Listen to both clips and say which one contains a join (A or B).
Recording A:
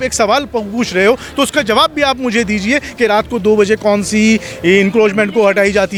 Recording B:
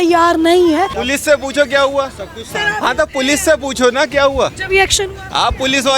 B